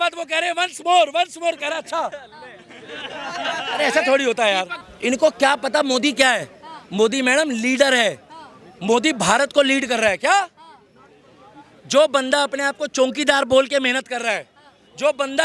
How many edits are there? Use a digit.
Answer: 1